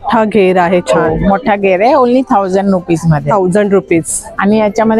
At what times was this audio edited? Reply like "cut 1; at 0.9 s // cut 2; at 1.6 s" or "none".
none